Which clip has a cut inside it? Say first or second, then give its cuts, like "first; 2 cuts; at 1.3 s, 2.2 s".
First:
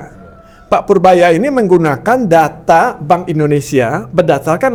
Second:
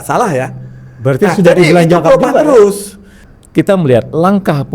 second; 1 cut; at 3.1 s